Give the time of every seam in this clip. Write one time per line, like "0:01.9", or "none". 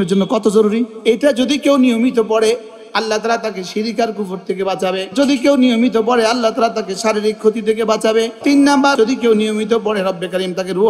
0:00.9
0:05.1
0:08.9